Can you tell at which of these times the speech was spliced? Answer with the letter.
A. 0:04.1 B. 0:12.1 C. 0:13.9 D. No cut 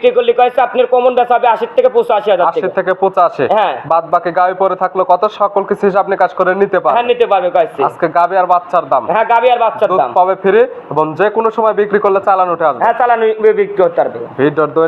D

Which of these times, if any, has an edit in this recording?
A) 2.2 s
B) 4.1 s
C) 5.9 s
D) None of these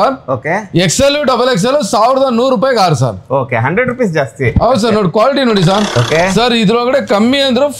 C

